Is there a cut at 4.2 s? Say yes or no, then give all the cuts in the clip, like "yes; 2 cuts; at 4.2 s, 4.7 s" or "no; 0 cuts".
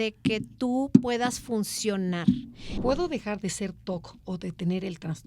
no; 1 cut; at 2.7 s